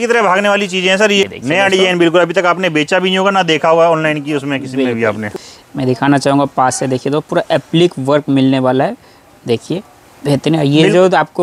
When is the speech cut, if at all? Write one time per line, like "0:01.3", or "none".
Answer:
0:01.2
0:05.3